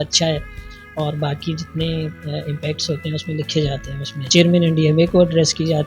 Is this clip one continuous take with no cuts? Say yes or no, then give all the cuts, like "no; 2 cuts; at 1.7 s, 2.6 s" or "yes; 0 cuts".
no; 1 cut; at 4.2 s